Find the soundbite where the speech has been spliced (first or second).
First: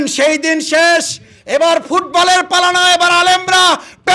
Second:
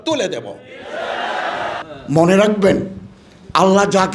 second